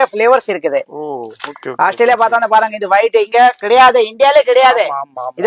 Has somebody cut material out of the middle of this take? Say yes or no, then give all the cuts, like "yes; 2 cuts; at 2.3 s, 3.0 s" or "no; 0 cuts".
no; 0 cuts